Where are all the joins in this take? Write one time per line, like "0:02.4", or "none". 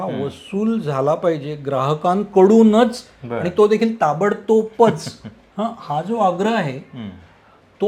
none